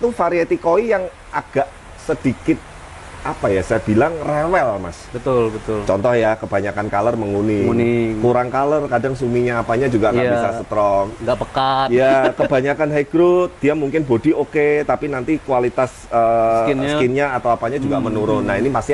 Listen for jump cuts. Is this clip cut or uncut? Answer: uncut